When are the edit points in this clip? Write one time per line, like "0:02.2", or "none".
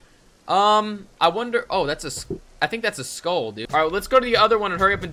0:03.6